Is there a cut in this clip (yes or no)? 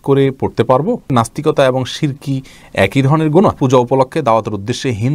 yes